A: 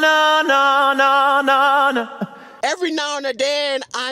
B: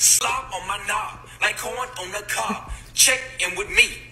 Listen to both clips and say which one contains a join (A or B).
A